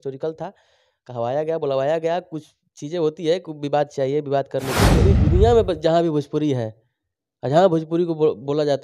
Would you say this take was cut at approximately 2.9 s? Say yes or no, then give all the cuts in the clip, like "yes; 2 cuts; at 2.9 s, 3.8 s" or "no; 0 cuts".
no; 1 cut; at 5.0 s